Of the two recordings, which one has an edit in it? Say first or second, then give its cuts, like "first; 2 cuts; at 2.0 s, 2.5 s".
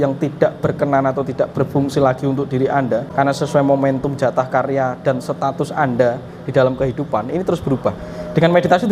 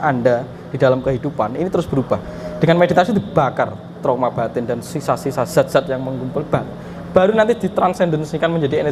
first; 1 cut; at 3.1 s